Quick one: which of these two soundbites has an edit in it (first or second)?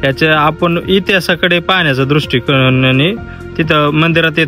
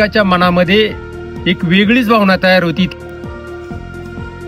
second